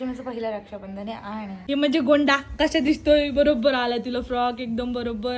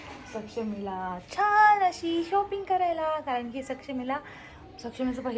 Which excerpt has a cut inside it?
first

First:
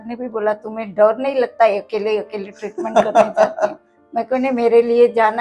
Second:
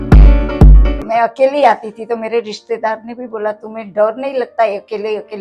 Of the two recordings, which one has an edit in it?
second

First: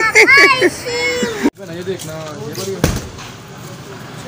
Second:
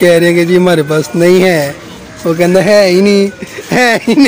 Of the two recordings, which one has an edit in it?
first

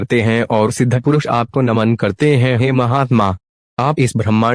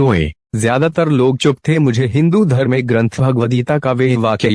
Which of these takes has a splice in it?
second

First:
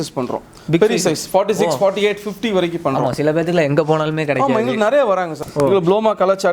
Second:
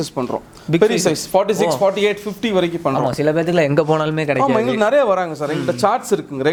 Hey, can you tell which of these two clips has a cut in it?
first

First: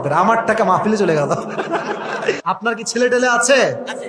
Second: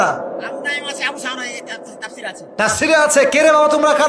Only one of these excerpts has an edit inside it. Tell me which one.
first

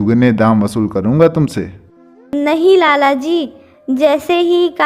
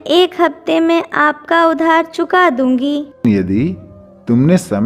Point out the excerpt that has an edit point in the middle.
second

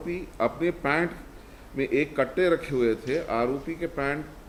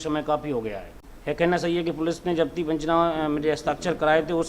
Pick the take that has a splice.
second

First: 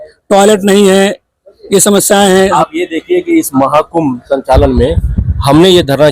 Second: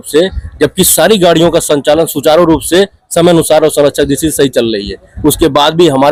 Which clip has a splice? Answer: first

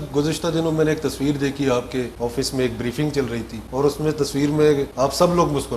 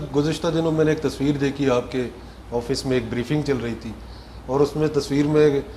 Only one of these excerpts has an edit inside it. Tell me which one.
first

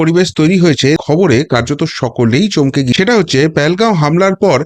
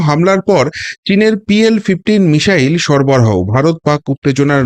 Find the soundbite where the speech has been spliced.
first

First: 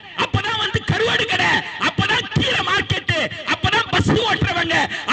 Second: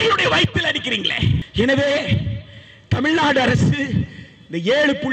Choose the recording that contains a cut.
second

